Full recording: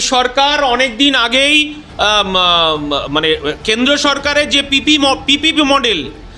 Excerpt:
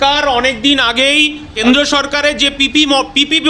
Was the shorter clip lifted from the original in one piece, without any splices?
no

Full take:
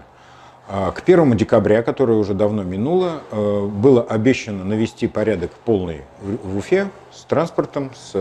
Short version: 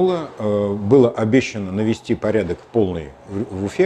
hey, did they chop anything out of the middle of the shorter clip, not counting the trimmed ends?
no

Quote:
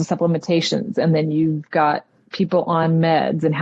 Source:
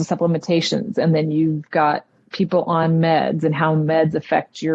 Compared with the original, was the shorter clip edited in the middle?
no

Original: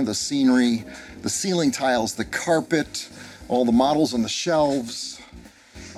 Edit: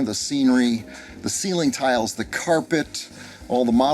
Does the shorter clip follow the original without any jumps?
yes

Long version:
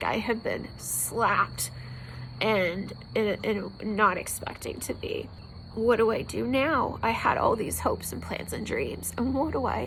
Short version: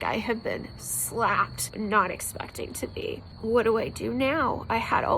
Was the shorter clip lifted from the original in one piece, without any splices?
no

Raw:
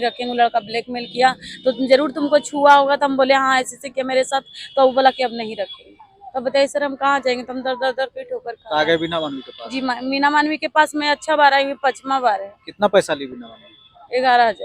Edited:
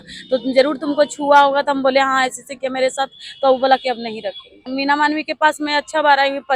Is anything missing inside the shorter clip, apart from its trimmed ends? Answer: yes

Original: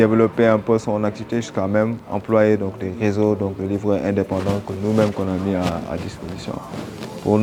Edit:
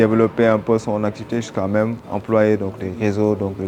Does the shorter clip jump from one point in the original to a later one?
no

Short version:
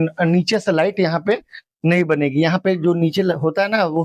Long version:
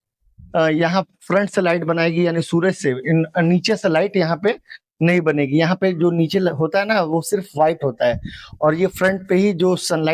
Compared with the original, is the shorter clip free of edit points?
yes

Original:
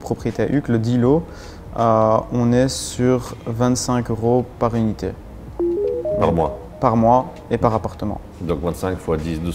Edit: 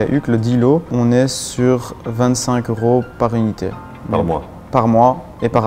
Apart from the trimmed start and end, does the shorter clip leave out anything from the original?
yes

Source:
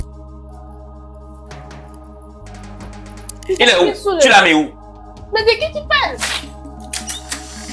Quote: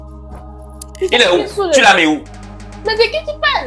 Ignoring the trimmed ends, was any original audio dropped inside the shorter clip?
yes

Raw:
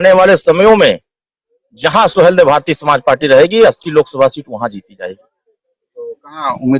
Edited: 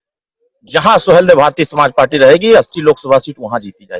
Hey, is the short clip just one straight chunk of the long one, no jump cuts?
yes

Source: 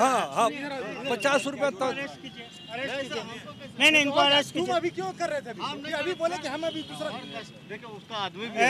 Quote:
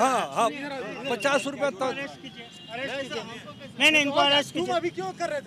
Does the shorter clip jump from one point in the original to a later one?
no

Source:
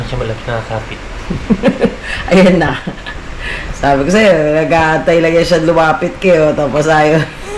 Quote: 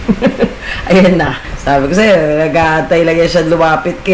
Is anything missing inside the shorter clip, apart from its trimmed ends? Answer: yes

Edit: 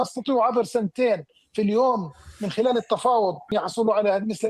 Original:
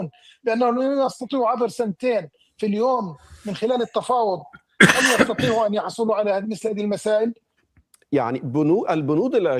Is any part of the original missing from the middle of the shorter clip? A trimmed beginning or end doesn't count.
yes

